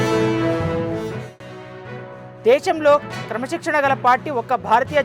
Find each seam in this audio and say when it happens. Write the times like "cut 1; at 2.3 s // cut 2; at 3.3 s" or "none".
cut 1; at 1.2 s